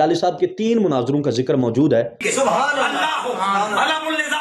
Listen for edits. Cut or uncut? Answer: cut